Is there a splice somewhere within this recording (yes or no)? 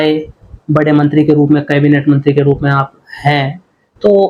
no